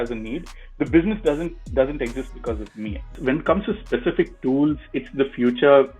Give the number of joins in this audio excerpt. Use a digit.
1